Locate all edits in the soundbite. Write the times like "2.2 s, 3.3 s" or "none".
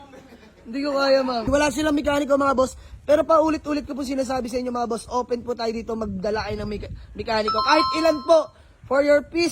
1.5 s